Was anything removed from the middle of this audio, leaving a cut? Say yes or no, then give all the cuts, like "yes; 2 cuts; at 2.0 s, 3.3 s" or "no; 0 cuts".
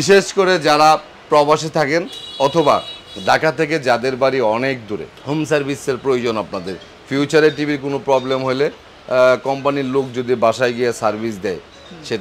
no; 0 cuts